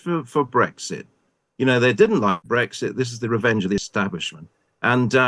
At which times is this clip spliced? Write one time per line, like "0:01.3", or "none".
0:02.4